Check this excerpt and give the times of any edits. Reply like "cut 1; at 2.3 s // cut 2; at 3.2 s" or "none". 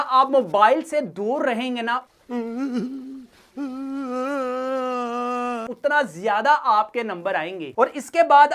cut 1; at 2.1 s // cut 2; at 5.6 s // cut 3; at 7.6 s